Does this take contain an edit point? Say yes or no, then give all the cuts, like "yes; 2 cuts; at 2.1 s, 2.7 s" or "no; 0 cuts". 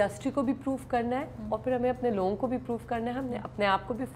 no; 0 cuts